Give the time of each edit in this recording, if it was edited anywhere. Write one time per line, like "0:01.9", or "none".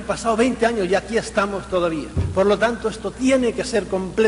none